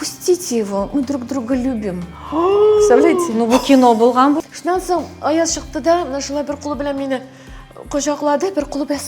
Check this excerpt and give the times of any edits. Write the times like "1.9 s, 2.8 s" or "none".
4.4 s